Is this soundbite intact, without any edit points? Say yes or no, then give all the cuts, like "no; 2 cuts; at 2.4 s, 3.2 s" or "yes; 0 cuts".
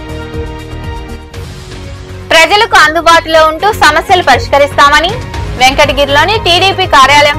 yes; 0 cuts